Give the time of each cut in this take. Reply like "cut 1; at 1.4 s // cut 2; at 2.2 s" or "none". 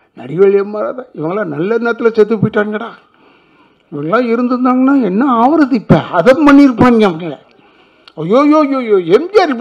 none